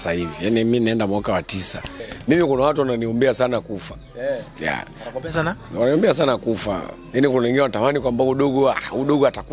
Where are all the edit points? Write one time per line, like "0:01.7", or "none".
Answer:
0:02.0